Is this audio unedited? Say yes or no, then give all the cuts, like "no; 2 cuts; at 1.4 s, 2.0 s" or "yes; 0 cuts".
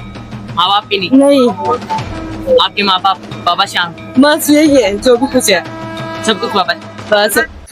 yes; 0 cuts